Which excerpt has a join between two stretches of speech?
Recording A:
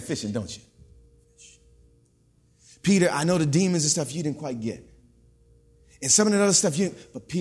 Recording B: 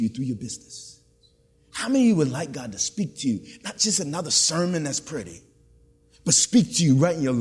A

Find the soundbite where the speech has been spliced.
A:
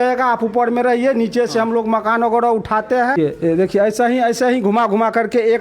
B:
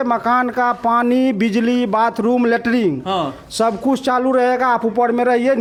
A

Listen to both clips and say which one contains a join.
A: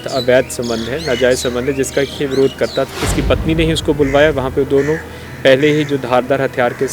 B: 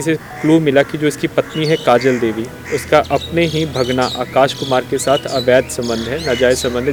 A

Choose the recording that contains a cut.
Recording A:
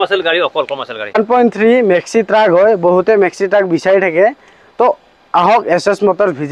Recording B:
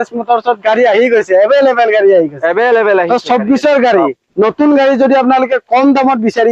A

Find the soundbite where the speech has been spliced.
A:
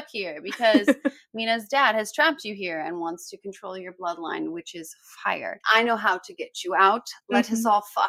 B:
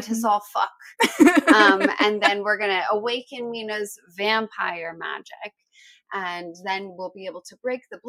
A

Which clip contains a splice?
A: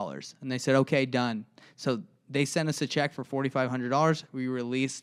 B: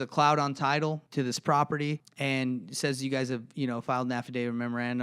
B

